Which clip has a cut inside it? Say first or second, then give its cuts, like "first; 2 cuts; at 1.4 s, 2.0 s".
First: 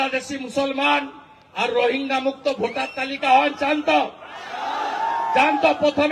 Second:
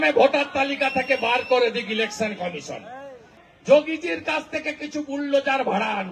second; 1 cut; at 3.3 s